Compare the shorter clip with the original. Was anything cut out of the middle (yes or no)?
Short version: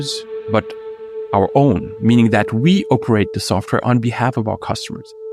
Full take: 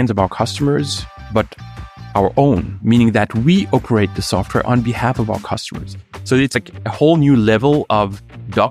no